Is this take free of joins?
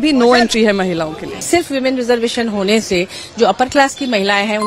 no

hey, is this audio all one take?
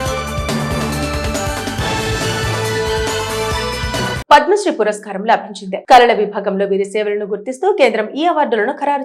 yes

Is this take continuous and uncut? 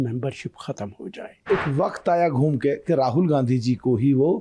no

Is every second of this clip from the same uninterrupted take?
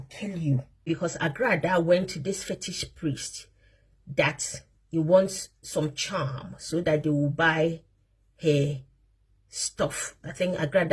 no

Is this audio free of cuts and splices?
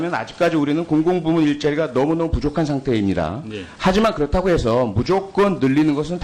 yes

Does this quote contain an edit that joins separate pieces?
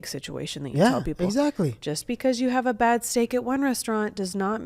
no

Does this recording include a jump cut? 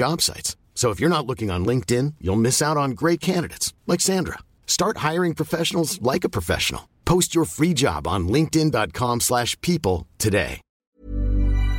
yes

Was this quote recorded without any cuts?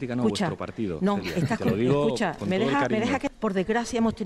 yes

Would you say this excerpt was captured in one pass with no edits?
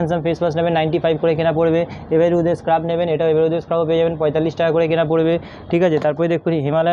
yes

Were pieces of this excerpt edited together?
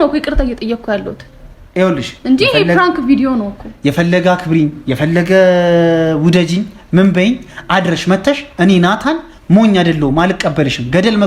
no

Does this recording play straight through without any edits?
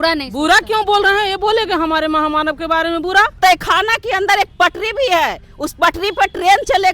no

